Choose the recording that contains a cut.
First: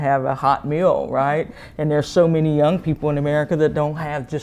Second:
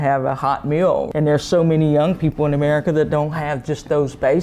second; 1 cut; at 1.1 s

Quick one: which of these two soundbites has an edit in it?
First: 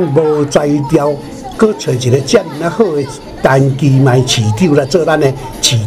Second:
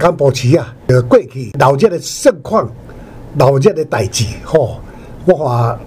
second; 2 cuts; at 0.8 s, 1.6 s

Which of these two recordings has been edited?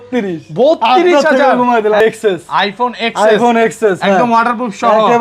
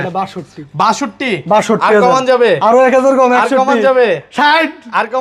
first; 1 cut; at 2.0 s

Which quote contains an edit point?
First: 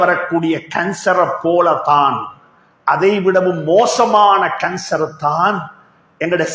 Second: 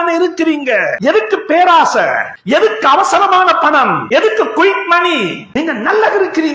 second; 4 cuts; at 0.9 s, 2.3 s, 4.0 s, 5.4 s

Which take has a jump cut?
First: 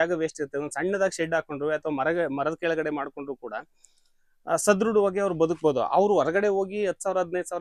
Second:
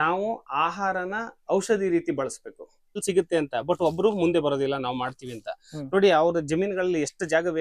second; 1 cut; at 3.0 s

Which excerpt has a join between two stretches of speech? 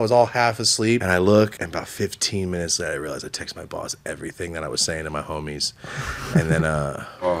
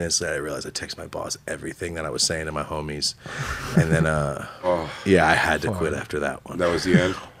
first; 2 cuts; at 1.0 s, 1.6 s

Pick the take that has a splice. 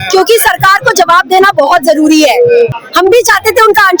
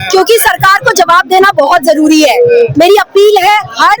first; 1 cut; at 2.7 s

